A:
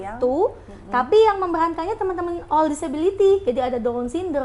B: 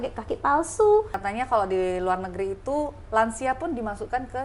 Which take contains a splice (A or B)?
B